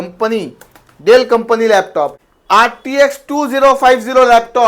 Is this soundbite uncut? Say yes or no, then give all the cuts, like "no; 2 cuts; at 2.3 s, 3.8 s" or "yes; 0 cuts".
no; 1 cut; at 2.1 s